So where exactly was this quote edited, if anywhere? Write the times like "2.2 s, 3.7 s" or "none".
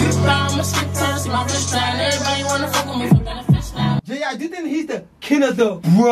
none